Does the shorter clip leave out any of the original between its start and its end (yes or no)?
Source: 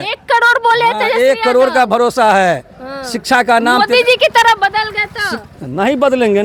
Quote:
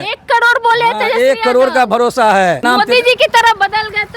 yes